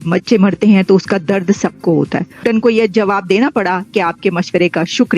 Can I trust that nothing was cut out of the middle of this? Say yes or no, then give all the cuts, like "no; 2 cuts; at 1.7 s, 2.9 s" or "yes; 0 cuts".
no; 1 cut; at 2.4 s